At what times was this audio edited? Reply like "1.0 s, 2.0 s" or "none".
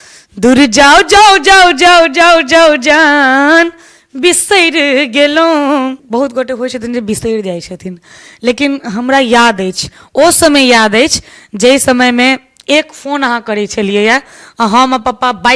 6.0 s